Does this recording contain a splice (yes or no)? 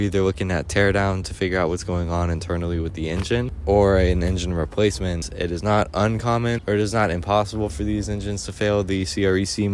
yes